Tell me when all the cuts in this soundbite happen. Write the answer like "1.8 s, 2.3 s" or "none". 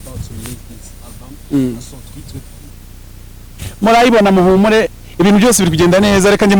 none